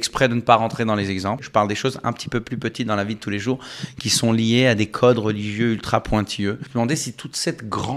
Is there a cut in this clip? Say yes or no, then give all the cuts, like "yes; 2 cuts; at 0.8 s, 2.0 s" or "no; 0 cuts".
yes; 2 cuts; at 1.4 s, 6.6 s